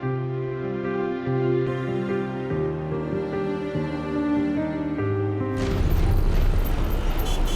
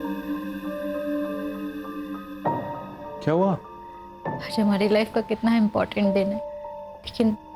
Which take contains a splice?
first; 1 cut; at 5.8 s

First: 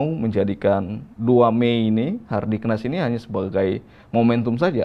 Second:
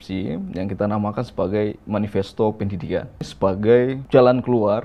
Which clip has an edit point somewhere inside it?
second; 2 cuts; at 3.2 s, 4.0 s

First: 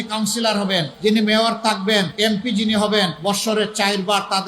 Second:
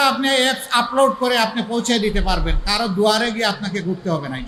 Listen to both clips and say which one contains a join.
first; 3 cuts; at 0.9 s, 2.1 s, 3.2 s

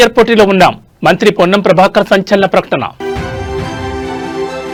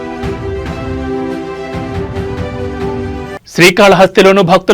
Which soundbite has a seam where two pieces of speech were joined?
second; 1 cut; at 3.1 s

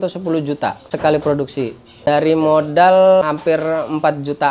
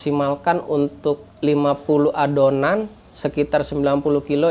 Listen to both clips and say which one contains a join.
first; 3 cuts; at 0.8 s, 2.1 s, 3.2 s

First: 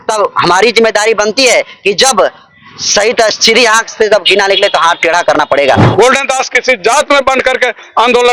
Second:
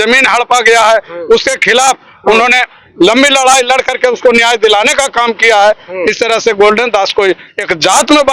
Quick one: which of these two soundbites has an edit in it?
first; 1 cut; at 5.9 s

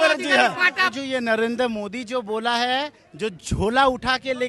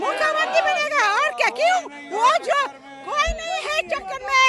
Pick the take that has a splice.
first; 1 cut; at 0.9 s

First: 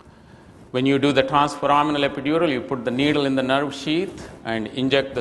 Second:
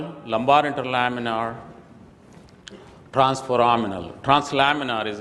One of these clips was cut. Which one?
first; 1 cut; at 3.8 s

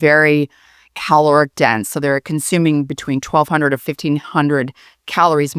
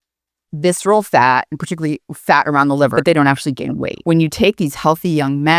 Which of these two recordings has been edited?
second; 2 cuts; at 2.9 s, 3.9 s

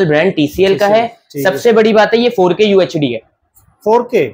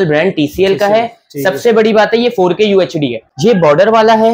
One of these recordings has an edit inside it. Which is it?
second; 1 cut; at 3.2 s

